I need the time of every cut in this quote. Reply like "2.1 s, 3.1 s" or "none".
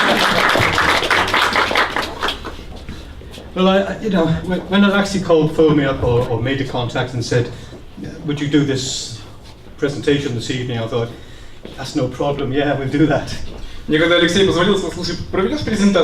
4.4 s

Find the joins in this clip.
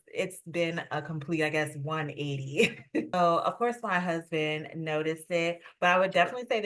3.1 s

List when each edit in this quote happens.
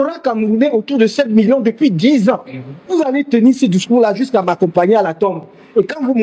2.8 s

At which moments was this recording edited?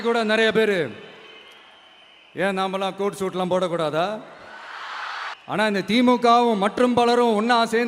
5.3 s

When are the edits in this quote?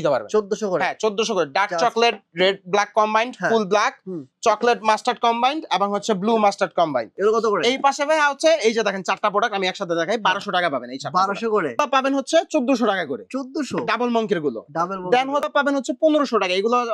7.1 s, 11.8 s, 15.5 s

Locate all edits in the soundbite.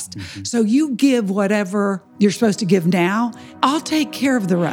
2.0 s, 3.4 s

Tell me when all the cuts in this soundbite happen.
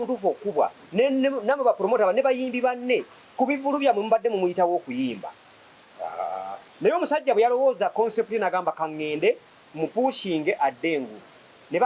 none

